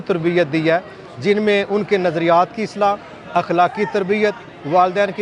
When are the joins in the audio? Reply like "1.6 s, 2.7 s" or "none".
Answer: none